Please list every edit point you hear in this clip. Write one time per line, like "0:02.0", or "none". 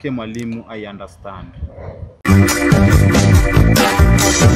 0:02.1

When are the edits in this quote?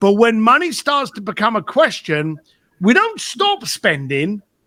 none

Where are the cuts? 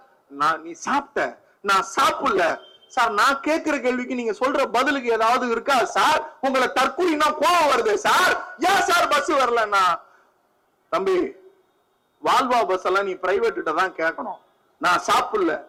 none

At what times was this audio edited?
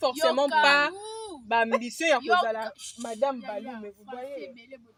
none

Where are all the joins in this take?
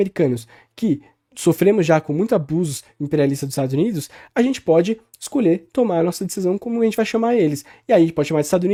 none

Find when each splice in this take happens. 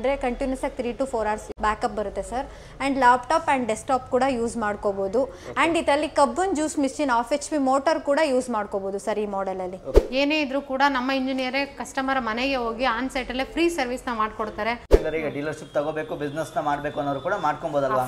0:01.5
0:10.0
0:14.9

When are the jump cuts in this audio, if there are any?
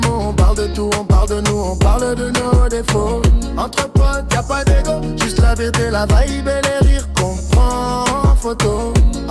none

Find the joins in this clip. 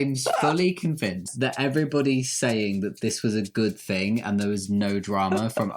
0:01.3

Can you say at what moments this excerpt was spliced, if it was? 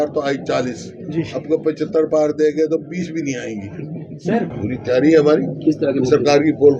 0:04.5

